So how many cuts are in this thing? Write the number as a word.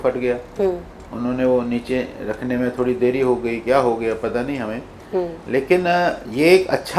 zero